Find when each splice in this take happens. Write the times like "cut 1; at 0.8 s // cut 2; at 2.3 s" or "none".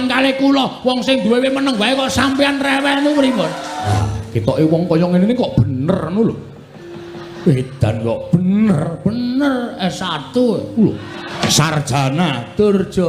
cut 1; at 4.0 s // cut 2; at 11.4 s